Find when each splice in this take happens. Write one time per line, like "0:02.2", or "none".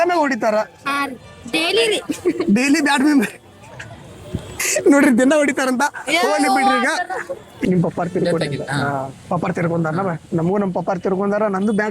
0:07.6